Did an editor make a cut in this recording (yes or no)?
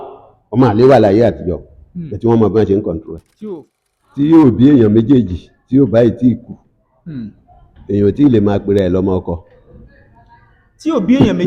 yes